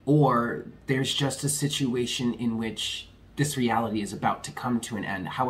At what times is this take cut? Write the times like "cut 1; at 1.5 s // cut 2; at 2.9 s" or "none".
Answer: none